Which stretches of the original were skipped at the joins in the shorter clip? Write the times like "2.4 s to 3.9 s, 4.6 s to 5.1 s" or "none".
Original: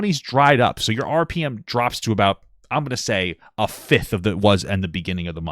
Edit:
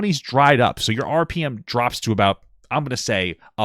none